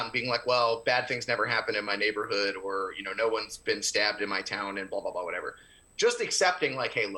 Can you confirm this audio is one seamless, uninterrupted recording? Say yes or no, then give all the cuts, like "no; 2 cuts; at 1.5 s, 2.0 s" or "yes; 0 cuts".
yes; 0 cuts